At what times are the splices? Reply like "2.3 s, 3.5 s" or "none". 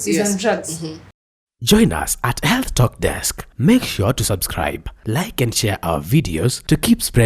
1.4 s

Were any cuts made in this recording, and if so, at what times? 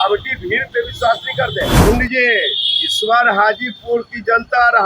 1.8 s

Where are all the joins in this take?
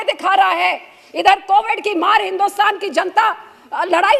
none

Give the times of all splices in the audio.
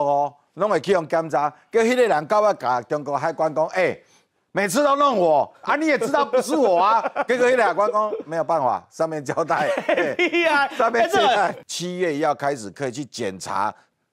11.6 s

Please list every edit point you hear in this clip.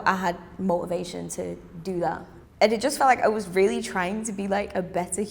2.3 s

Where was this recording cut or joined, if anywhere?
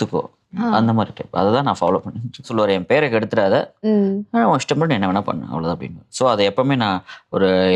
2.5 s

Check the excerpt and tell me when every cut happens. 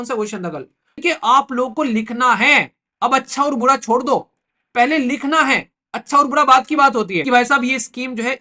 1.0 s, 7.2 s

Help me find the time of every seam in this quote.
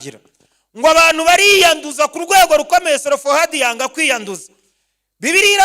none

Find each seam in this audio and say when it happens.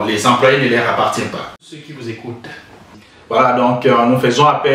1.5 s

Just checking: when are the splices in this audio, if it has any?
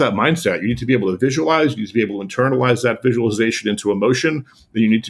none

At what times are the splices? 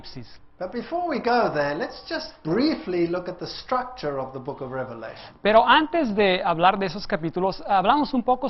none

